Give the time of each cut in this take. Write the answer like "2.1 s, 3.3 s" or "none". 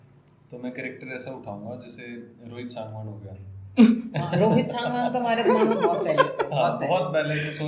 none

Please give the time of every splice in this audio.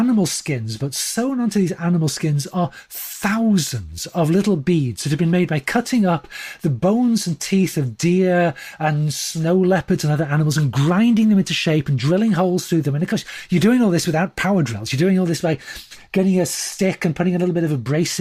none

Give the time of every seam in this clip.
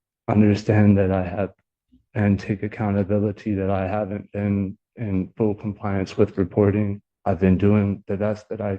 7.1 s

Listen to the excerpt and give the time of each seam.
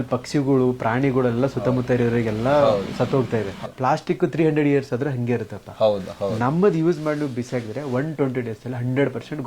3.7 s

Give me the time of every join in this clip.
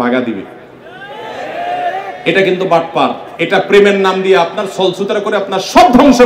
3.2 s

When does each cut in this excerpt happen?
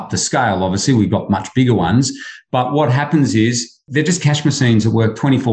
none

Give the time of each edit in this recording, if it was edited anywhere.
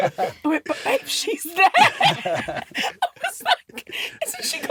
none

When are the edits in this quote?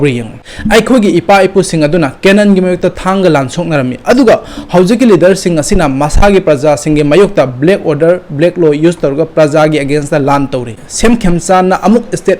10.8 s

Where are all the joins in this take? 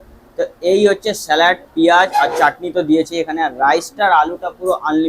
none

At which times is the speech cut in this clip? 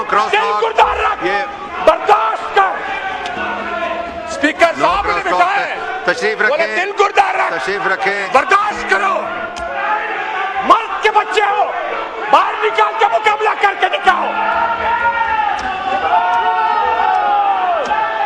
none

